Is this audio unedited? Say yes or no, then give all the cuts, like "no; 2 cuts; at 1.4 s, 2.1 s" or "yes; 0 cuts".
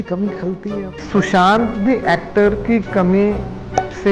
no; 1 cut; at 1.0 s